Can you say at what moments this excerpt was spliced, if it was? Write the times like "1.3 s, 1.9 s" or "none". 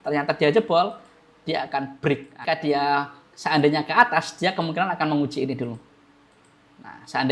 2.4 s